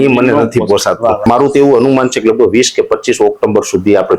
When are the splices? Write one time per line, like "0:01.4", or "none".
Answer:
0:01.2